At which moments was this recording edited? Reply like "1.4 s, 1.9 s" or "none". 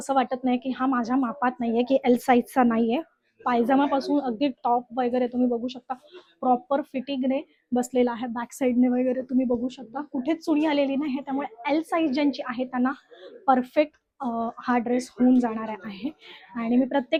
none

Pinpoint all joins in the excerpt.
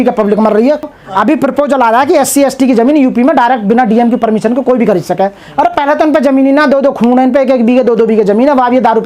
0.9 s

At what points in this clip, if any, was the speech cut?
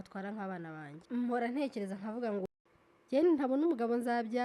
1.0 s, 2.4 s

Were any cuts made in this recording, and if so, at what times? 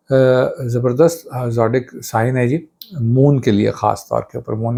none

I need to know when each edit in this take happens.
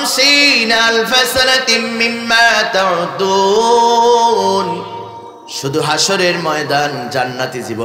none

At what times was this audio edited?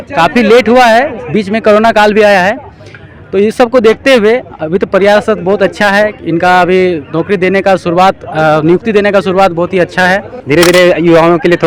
10.3 s

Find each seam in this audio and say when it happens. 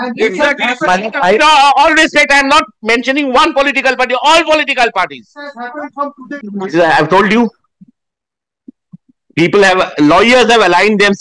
6.3 s

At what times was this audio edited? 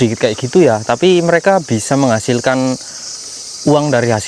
none

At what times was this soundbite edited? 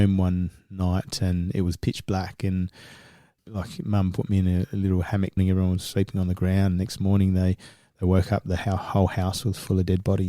3.4 s, 5.4 s

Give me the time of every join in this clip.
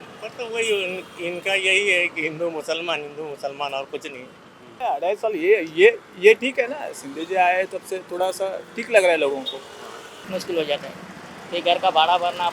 4.8 s, 10.3 s

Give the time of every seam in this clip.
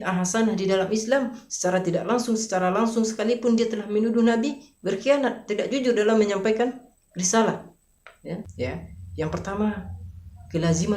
8.5 s

